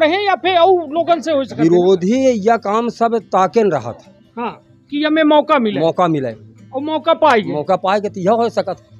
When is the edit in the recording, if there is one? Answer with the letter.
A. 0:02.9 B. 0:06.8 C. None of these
C